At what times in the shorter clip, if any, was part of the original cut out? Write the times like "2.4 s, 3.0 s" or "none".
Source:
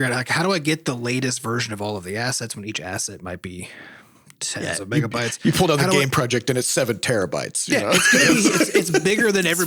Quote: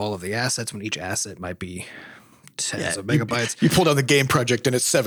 none